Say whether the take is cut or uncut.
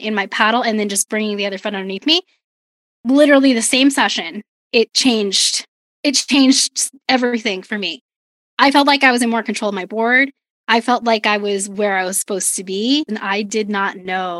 cut